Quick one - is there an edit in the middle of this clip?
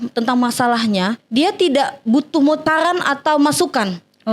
yes; 1 cut; at 1.2 s

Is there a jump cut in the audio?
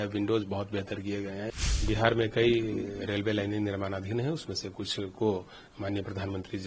yes; 1 cut; at 1.8 s

